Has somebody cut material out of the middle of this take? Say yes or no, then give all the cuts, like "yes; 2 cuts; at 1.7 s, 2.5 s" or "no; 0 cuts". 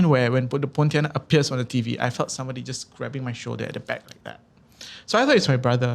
no; 0 cuts